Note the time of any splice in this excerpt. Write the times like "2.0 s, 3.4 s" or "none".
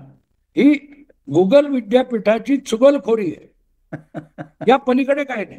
none